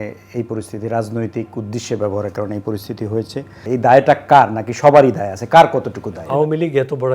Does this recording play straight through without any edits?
no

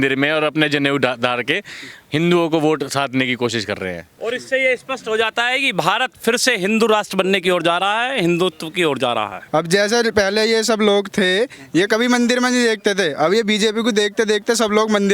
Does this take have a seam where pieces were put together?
yes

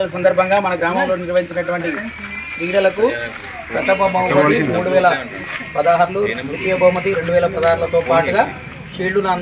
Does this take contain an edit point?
no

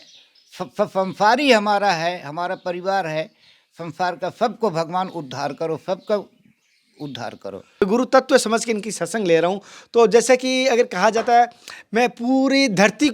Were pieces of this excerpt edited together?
yes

